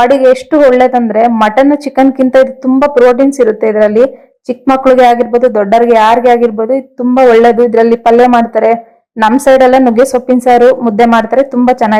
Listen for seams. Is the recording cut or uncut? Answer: uncut